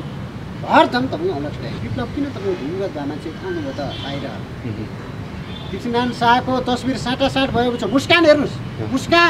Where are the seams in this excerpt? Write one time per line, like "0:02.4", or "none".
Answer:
0:01.8